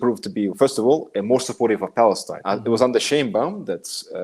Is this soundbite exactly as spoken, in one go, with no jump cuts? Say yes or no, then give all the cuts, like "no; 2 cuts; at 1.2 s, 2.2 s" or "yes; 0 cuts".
no; 1 cut; at 2.3 s